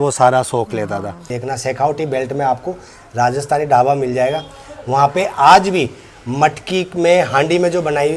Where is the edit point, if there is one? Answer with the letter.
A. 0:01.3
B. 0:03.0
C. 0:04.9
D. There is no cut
A